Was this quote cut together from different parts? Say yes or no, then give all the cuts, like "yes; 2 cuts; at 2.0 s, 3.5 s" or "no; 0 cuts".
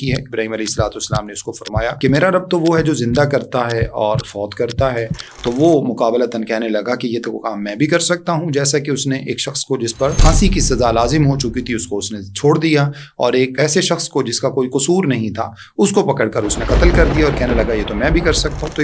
yes; 3 cuts; at 2.0 s, 10.2 s, 13.5 s